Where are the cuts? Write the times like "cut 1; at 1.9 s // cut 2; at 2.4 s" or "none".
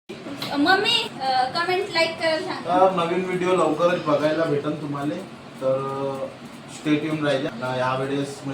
cut 1; at 1.1 s // cut 2; at 7.5 s